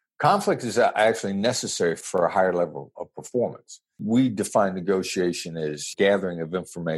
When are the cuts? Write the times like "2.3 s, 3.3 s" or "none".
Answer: 2.0 s, 4.0 s, 5.9 s